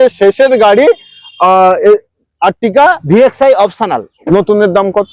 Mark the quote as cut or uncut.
cut